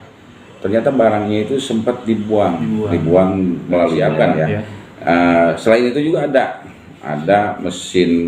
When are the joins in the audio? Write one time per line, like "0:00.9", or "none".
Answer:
0:04.1